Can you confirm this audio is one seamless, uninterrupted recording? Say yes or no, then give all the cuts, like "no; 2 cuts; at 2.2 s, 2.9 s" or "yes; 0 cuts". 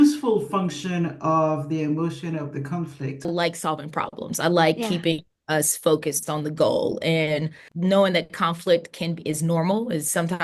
no; 2 cuts; at 3.2 s, 7.6 s